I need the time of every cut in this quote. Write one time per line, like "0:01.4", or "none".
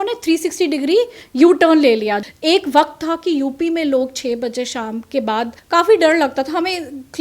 0:02.2
0:05.6